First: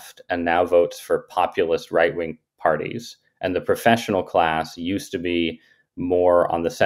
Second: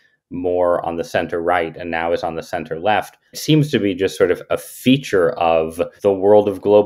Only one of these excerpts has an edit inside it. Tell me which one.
second; 2 cuts; at 3.4 s, 5.9 s

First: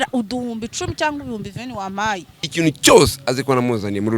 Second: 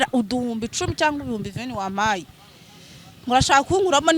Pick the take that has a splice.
first; 1 cut; at 2.4 s

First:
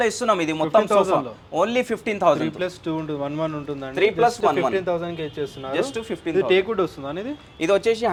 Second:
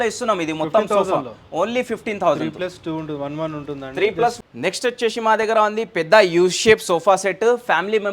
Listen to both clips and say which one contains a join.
second; 1 cut; at 4.4 s

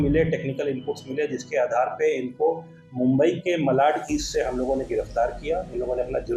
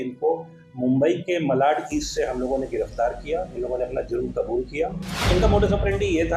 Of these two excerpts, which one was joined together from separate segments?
second; 1 cut; at 5.1 s

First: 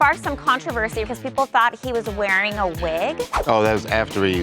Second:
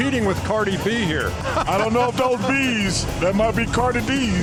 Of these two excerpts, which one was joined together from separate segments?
first; 1 cut; at 1.0 s

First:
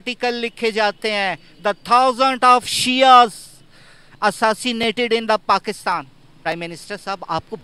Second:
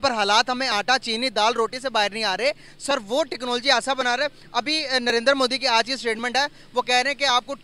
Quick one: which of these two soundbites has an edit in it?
first; 1 cut; at 6.3 s

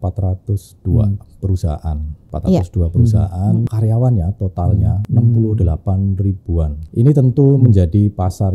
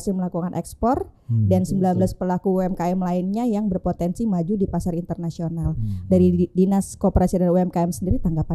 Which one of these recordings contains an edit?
first; 4 cuts; at 2.3 s, 3.7 s, 5.0 s, 6.8 s

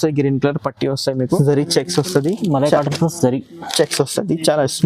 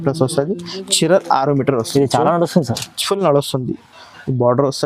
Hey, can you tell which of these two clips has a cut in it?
first; 1 cut; at 1.3 s

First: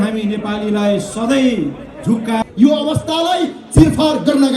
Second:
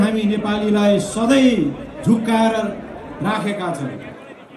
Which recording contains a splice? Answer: first; 1 cut; at 2.4 s

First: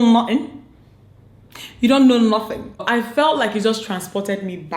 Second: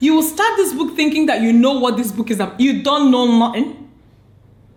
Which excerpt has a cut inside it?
first; 1 cut; at 2.8 s

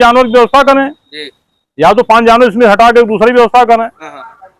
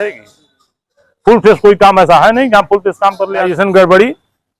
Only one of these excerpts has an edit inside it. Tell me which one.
second; 1 cut; at 3.5 s

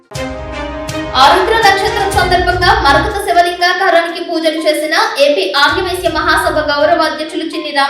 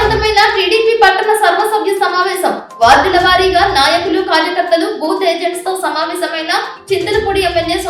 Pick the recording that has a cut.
first; 1 cut; at 1.1 s

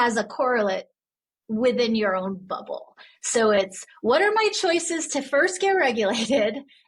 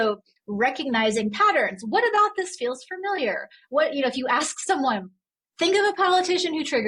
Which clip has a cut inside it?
second; 1 cut; at 5.4 s

